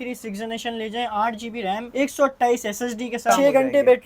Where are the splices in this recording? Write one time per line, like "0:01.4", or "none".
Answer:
0:01.9
0:03.3